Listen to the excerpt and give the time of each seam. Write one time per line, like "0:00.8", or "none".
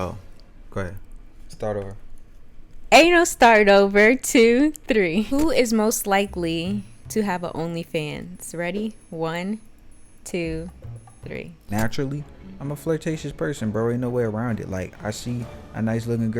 0:05.3
0:11.6